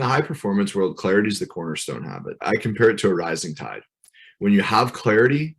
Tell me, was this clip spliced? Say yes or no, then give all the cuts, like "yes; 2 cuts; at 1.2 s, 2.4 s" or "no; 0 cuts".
yes; 1 cut; at 2.4 s